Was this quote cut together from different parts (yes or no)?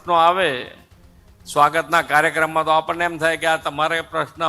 no